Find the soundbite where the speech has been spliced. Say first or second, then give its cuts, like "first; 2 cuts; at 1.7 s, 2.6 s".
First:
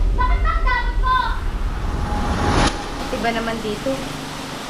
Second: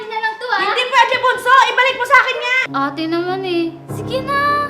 second; 1 cut; at 2.6 s